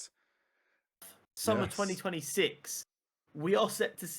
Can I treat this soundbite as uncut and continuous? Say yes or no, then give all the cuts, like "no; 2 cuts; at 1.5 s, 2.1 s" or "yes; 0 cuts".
no; 1 cut; at 1.1 s